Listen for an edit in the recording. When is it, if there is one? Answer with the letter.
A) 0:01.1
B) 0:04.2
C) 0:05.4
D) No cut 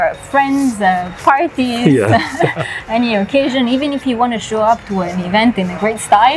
D